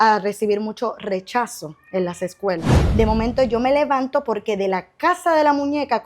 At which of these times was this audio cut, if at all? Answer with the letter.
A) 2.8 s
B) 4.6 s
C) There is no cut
A